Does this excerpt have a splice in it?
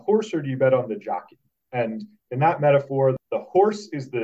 yes; 1 cut; at 3.2 s

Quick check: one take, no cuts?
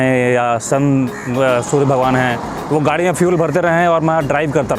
yes; 0 cuts

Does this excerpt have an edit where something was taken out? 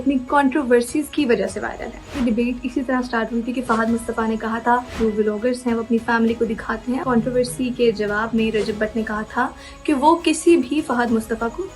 yes; 3 cuts; at 2.2 s, 4.9 s, 7.0 s

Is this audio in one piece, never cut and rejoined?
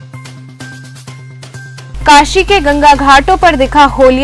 yes; 0 cuts

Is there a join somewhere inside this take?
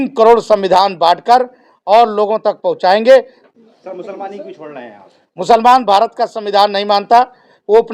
yes; 1 cut; at 3.4 s

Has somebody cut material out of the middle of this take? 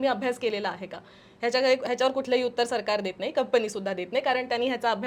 no; 0 cuts

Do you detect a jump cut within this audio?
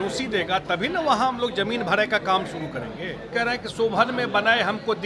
yes; 1 cut; at 3.3 s

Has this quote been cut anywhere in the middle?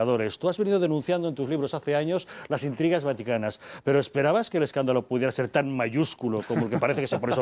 yes; 1 cut; at 1.0 s

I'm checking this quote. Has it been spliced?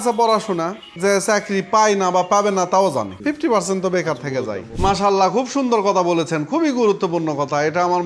yes; 3 cuts; at 0.9 s, 3.1 s, 4.7 s

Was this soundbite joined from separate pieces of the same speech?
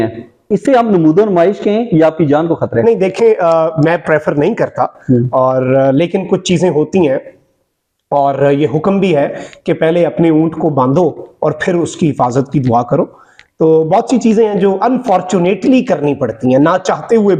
no; 0 cuts

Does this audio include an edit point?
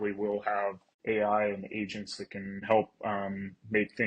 yes; 2 cuts; at 0.9 s, 2.6 s

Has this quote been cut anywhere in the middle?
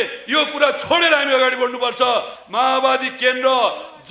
yes; 1 cut; at 2.3 s

